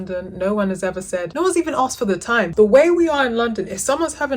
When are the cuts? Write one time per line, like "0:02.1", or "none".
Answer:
0:01.3
0:02.5